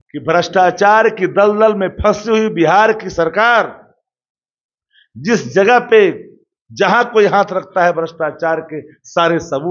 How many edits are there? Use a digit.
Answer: 0